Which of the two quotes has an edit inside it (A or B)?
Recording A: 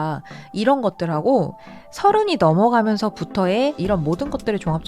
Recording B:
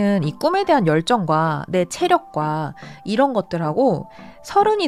A